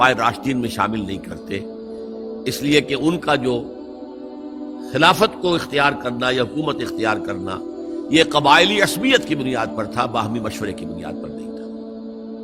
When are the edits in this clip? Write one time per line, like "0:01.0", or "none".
0:10.9